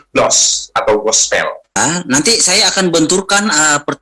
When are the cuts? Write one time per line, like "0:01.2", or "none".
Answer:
0:01.8